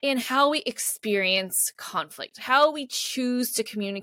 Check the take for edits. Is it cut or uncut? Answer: uncut